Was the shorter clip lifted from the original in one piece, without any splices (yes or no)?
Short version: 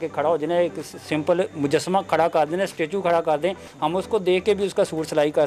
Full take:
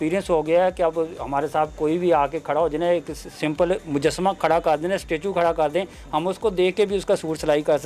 yes